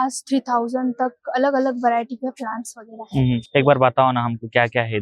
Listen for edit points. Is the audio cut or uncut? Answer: uncut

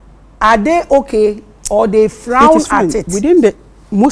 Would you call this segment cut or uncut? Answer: cut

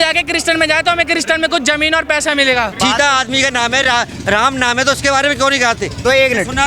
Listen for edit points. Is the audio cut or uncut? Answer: cut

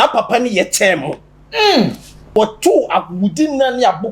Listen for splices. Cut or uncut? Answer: cut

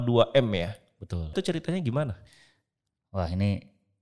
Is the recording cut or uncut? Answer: cut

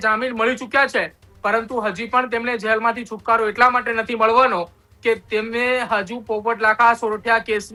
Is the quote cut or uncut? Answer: uncut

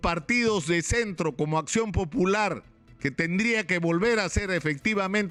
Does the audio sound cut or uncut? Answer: uncut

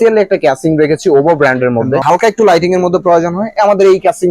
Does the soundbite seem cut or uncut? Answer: cut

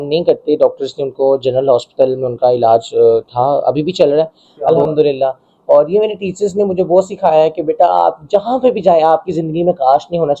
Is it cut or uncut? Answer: cut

